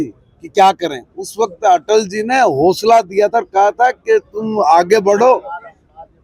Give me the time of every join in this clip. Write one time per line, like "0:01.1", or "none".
none